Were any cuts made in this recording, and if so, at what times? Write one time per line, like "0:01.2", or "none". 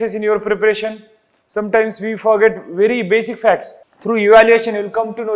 none

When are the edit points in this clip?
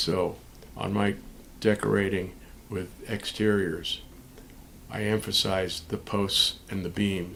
none

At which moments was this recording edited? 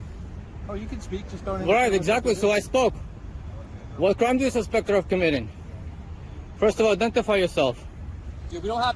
none

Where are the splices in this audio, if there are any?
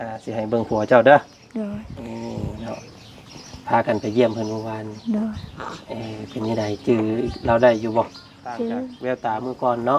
0:08.9

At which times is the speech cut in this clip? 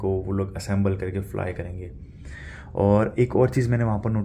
none

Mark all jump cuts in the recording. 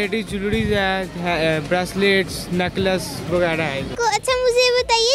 0:03.9

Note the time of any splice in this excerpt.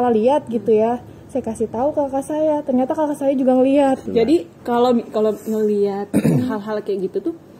0:04.0

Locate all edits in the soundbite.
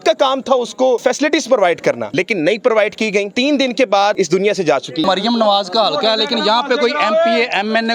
0:01.0
0:02.0
0:03.3
0:05.0

